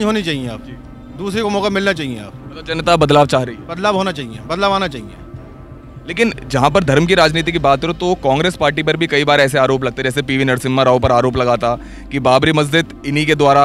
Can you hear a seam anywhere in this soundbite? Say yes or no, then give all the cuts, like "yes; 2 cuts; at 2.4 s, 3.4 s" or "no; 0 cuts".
no; 0 cuts